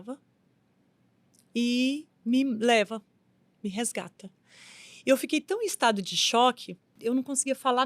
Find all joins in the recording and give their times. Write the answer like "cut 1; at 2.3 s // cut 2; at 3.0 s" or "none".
cut 1; at 6.9 s